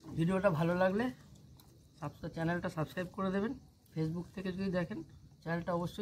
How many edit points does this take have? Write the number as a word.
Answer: zero